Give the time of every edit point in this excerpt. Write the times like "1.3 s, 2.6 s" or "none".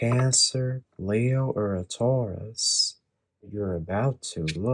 3.5 s